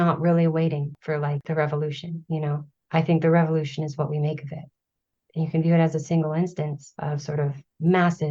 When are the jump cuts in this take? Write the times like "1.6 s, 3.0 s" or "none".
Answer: none

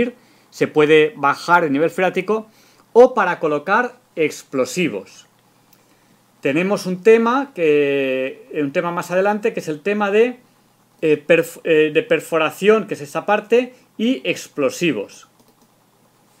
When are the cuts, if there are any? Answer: 8.1 s

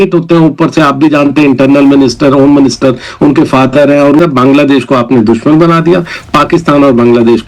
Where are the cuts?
4.2 s

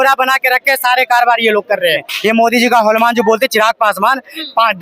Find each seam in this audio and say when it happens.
2.1 s

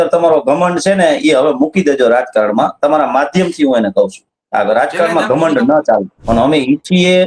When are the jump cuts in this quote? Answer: 6.1 s

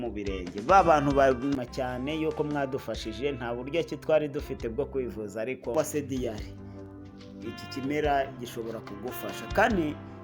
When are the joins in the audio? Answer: 1.5 s, 5.7 s

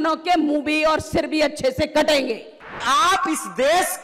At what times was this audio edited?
2.8 s

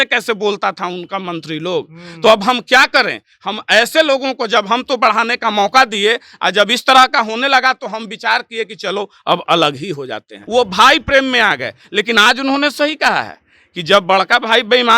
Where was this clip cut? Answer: 10.4 s

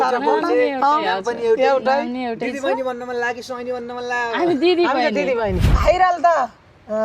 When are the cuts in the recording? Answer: 5.8 s

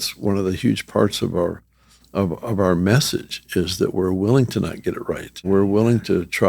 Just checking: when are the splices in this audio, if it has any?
5.4 s

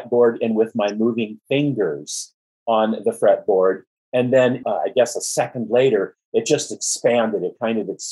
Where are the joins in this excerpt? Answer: 4.6 s

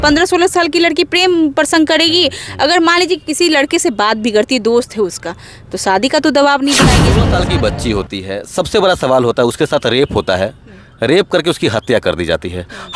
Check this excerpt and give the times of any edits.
7.2 s

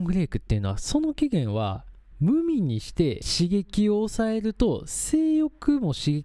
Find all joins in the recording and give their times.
3.2 s

